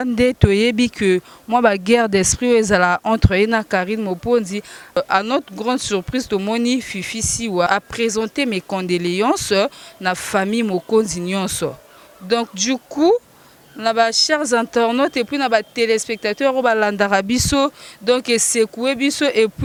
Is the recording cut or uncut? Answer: uncut